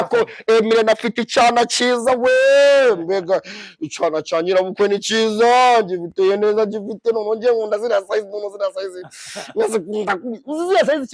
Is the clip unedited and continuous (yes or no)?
yes